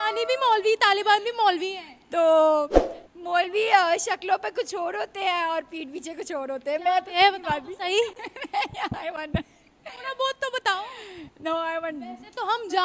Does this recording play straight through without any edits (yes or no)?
yes